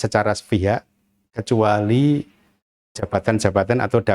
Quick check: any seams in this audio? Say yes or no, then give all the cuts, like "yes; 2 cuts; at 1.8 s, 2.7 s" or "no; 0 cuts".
no; 0 cuts